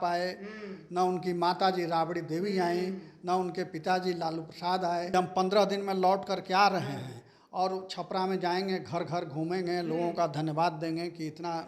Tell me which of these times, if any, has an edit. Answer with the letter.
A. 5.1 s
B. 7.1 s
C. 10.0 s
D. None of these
A